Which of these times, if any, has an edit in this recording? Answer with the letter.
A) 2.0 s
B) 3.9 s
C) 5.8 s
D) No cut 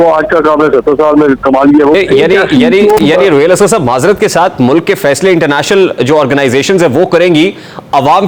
A